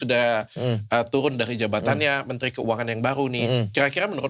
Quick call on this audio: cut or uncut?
uncut